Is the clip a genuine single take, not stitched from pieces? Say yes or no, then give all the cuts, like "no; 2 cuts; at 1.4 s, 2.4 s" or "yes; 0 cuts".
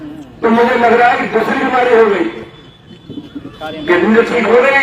yes; 0 cuts